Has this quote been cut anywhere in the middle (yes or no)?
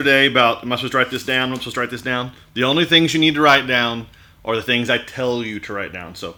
no